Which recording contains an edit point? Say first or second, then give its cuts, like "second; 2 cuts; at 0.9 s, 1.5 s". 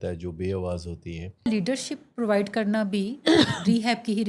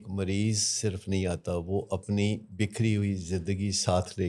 first; 1 cut; at 1.5 s